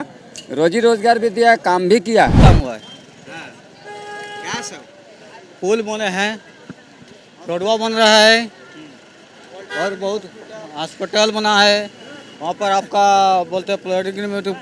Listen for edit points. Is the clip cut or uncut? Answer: cut